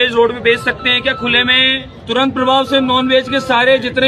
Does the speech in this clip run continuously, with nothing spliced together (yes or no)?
no